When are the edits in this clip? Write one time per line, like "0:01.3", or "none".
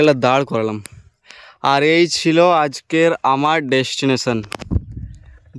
none